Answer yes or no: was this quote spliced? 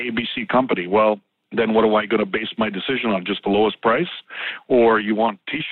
no